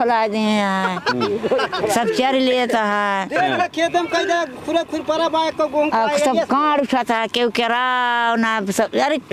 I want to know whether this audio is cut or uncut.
uncut